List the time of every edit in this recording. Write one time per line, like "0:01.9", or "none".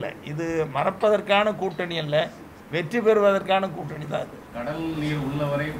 0:04.5